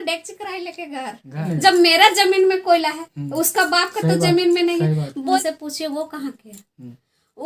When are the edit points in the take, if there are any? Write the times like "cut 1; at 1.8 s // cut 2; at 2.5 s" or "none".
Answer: cut 1; at 1.4 s // cut 2; at 5.4 s